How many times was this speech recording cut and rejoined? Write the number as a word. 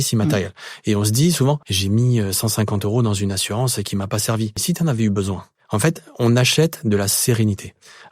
three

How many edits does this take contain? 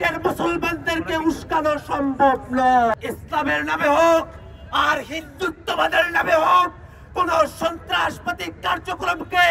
one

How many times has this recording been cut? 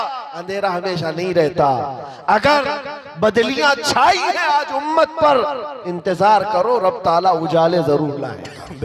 zero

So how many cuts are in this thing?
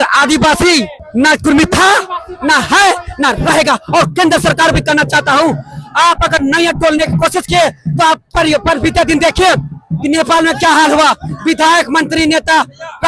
one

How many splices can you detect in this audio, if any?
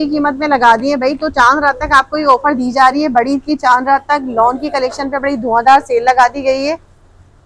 zero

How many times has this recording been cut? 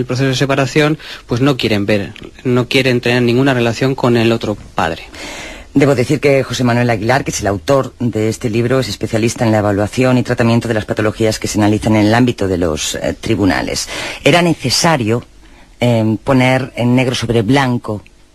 zero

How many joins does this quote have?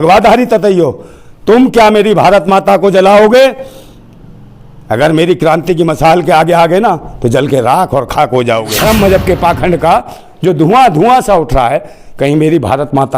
one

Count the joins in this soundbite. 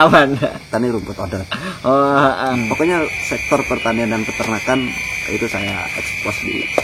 one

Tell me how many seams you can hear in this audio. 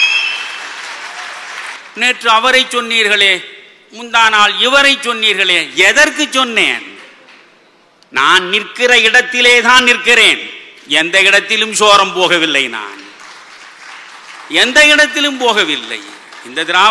one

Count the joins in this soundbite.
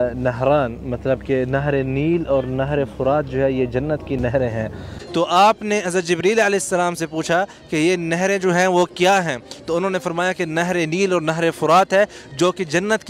one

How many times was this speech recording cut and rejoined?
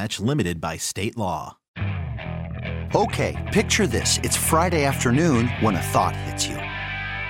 one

